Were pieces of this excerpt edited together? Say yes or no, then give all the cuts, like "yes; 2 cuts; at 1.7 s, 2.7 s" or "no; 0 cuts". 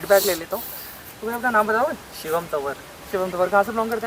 no; 0 cuts